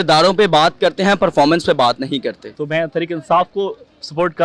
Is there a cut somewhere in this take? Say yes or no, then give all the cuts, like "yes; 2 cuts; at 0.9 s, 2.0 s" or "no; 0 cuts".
yes; 1 cut; at 2.4 s